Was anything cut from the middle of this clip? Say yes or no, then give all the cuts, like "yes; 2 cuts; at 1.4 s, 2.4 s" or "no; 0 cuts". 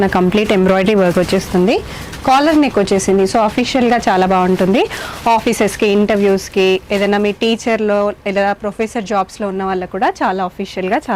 no; 0 cuts